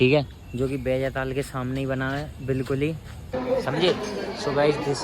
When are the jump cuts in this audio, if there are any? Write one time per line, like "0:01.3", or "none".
0:03.3